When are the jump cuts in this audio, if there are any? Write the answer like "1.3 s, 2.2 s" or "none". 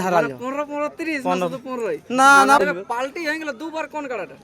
2.6 s